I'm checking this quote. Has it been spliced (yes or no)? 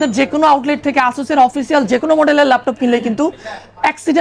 no